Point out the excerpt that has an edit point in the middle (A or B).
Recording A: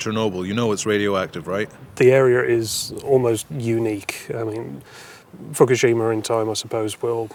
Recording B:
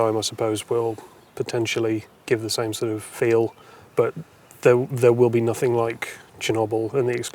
B